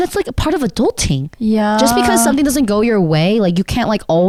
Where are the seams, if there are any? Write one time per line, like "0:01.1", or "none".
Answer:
none

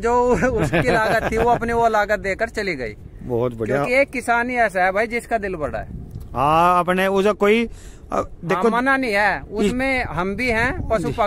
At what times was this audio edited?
none

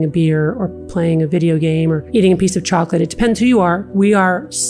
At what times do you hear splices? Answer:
0:02.0
0:03.9

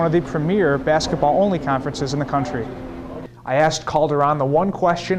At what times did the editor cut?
0:03.2

